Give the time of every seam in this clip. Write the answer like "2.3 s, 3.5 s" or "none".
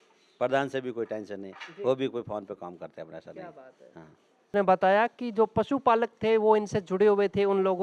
4.5 s